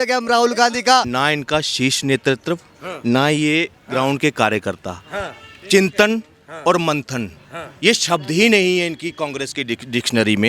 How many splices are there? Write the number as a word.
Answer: one